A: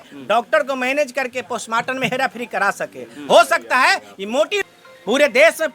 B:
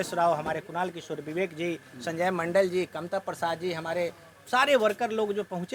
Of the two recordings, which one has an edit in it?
A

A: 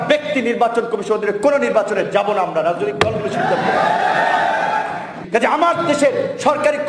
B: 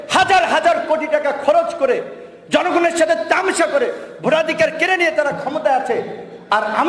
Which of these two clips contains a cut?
A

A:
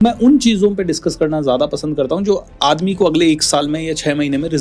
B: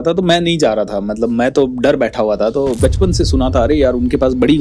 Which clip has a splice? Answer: B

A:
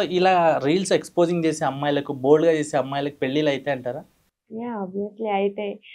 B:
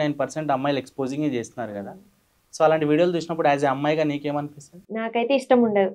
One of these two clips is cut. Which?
B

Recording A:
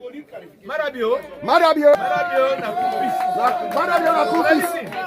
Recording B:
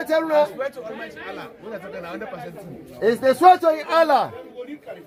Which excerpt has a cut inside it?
A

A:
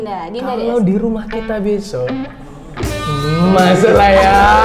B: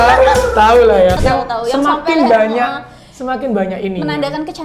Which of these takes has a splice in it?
B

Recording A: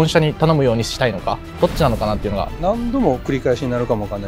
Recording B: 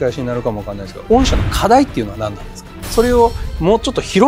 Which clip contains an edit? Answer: A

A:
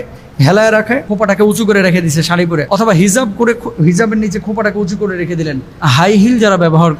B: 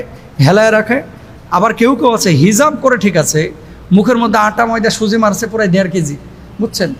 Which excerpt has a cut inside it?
A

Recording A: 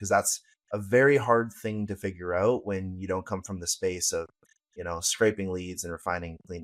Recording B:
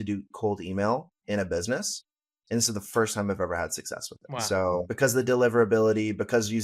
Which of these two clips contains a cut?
B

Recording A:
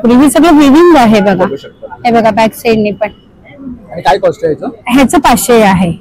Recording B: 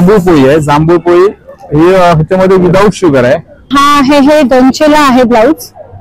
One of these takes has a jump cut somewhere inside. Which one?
B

